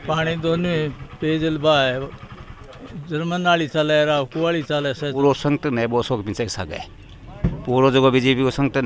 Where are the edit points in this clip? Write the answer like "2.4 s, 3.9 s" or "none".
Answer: 5.2 s